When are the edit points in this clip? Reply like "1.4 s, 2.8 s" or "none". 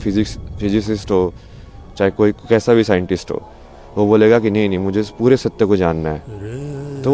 none